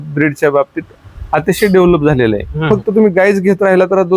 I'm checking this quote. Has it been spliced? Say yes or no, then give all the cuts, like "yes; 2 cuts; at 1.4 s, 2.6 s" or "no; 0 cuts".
yes; 1 cut; at 2.5 s